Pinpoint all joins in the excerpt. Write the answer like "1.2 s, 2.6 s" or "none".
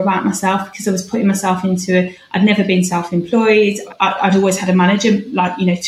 none